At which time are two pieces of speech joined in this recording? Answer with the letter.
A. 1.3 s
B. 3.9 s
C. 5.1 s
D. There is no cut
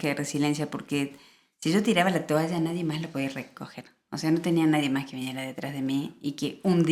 D